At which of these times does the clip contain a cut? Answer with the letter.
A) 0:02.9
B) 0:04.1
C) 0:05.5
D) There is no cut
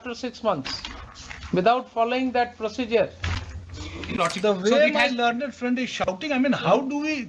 B